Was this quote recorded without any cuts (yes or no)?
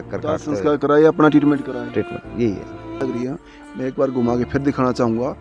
no